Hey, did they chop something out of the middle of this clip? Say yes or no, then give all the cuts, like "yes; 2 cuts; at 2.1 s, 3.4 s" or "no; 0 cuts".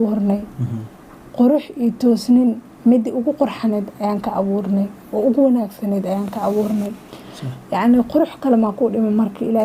no; 0 cuts